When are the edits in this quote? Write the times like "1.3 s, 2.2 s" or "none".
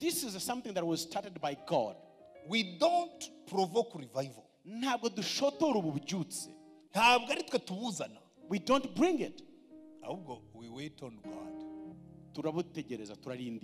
none